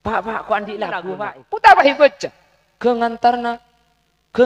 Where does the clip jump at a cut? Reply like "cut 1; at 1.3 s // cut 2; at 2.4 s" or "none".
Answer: cut 1; at 1.1 s